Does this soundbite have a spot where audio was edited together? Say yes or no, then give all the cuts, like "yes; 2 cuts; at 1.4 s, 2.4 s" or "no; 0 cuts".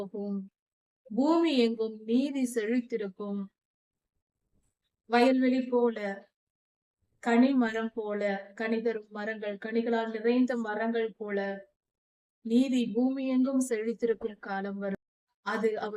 yes; 1 cut; at 15.0 s